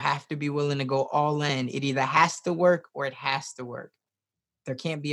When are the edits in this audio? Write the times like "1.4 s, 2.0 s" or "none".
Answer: none